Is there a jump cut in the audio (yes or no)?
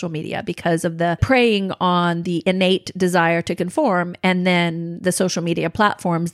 yes